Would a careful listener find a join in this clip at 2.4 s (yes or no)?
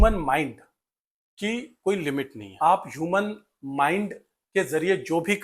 yes